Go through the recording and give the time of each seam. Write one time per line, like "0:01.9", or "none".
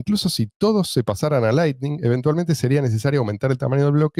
none